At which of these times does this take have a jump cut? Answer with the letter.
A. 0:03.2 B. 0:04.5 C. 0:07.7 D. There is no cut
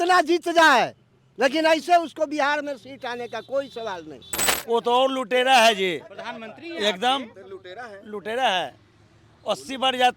B